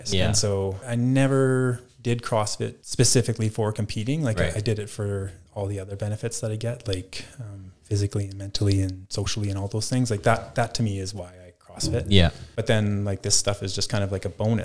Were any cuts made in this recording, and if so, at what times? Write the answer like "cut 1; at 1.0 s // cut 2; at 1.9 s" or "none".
cut 1; at 0.8 s // cut 2; at 2.8 s // cut 3; at 12.4 s